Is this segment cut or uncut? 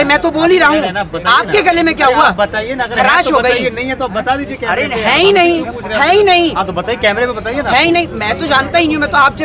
uncut